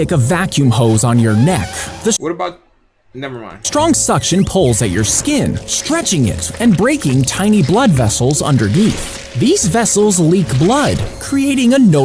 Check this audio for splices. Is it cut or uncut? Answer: uncut